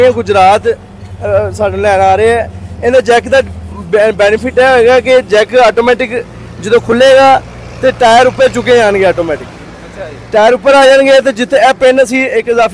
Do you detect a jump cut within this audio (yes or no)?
no